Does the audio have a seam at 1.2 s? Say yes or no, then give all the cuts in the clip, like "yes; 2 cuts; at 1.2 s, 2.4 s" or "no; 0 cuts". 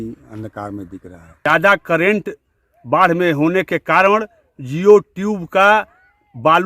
yes; 1 cut; at 1.2 s